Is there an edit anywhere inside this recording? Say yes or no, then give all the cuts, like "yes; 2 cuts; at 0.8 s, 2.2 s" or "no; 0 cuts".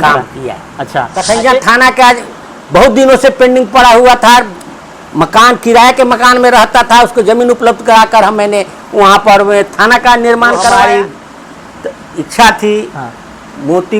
yes; 2 cuts; at 1.1 s, 10.7 s